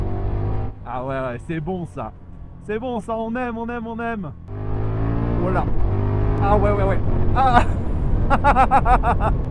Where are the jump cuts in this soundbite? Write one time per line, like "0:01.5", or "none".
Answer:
0:04.5